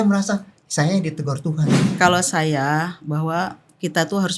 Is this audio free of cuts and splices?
no; 1 cut; at 1.8 s

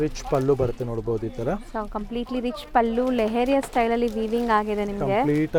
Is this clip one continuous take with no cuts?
yes; 0 cuts

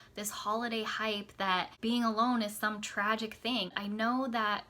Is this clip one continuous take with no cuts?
no; 2 cuts; at 1.7 s, 3.7 s

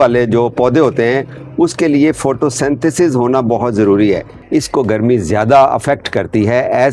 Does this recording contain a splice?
yes; 1 cut; at 4.4 s

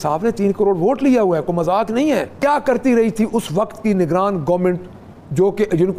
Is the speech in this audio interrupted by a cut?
yes; 1 cut; at 2.3 s

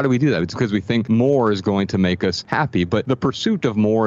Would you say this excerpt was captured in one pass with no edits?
no; 2 cuts; at 1.0 s, 2.8 s

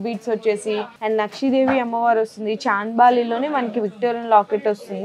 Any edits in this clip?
yes; 1 cut; at 0.9 s

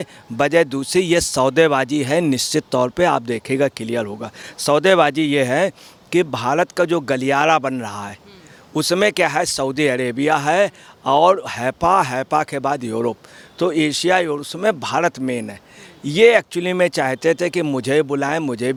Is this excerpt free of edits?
yes; 0 cuts

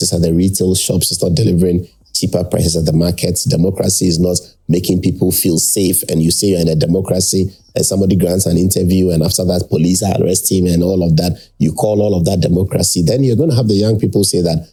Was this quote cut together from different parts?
no; 0 cuts

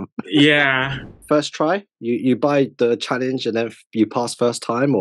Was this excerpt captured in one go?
no; 1 cut; at 1.2 s

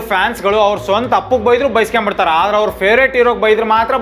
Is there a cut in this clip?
no; 0 cuts

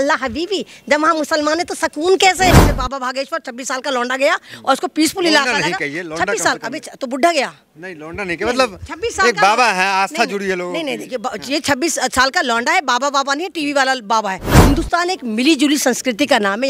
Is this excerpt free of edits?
no; 2 cuts; at 2.5 s, 14.5 s

